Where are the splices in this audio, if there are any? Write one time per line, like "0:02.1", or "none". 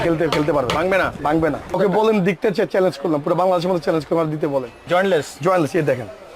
0:01.8
0:04.8